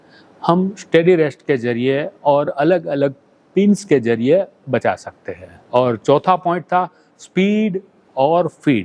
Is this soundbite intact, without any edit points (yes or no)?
yes